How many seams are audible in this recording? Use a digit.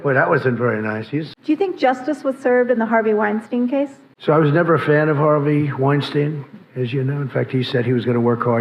1